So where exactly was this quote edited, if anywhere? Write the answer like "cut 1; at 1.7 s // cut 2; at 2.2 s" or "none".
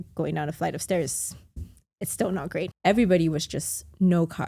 cut 1; at 2.7 s